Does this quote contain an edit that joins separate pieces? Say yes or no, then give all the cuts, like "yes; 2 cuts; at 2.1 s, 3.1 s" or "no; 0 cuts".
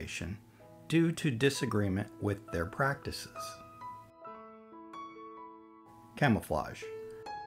no; 0 cuts